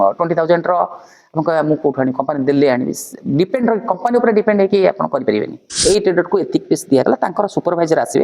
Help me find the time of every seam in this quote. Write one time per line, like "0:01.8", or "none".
0:05.7